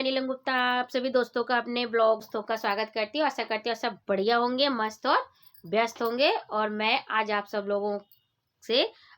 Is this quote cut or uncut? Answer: uncut